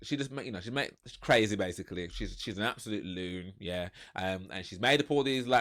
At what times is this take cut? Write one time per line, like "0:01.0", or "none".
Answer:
none